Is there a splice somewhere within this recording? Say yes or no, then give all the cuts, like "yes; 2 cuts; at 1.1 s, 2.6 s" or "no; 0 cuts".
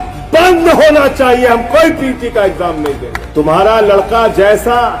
yes; 1 cut; at 3.1 s